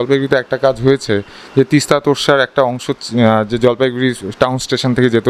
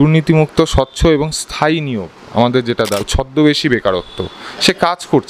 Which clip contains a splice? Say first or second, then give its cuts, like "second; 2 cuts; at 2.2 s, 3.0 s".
second; 1 cut; at 3.0 s